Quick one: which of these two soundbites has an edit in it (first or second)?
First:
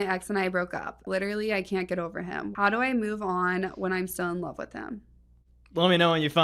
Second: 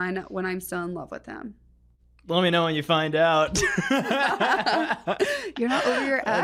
first